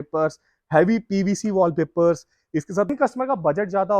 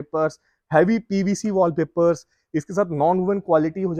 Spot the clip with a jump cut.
first; 1 cut; at 2.9 s

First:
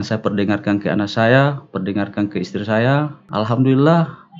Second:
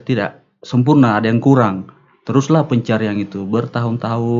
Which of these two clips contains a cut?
first; 1 cut; at 3.2 s

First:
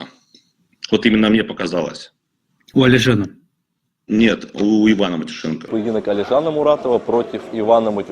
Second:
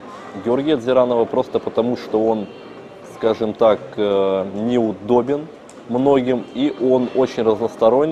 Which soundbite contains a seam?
first; 1 cut; at 5.7 s

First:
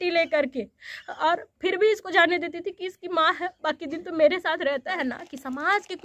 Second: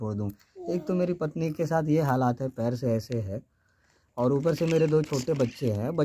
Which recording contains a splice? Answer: first; 1 cut; at 4.9 s

